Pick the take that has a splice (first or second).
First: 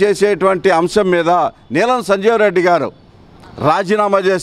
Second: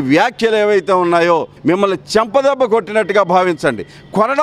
second